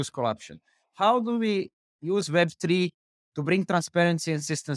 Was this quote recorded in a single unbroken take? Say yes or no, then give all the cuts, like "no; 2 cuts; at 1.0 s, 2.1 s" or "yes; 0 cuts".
yes; 0 cuts